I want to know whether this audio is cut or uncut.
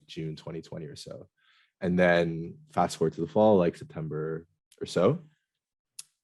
uncut